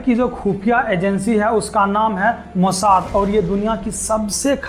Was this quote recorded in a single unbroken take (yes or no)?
yes